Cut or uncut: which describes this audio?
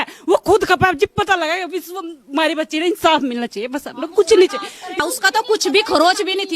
cut